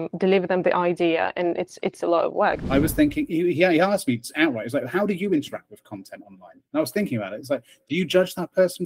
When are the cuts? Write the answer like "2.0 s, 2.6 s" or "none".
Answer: 2.6 s